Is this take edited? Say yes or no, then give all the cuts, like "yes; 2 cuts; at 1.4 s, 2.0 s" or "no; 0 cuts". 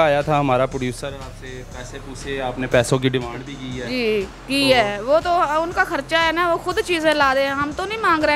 no; 0 cuts